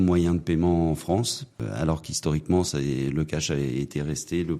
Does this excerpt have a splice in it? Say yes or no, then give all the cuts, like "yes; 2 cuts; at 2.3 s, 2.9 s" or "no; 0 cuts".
yes; 1 cut; at 1.7 s